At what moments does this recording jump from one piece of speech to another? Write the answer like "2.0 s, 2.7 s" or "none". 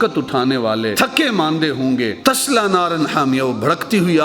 0.9 s, 2.2 s

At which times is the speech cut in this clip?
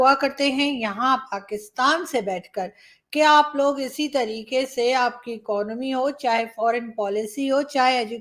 none

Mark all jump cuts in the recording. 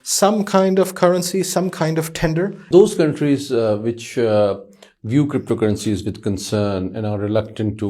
2.7 s

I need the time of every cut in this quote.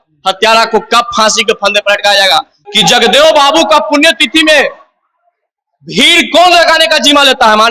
2.6 s

